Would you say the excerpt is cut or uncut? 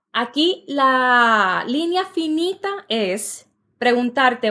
uncut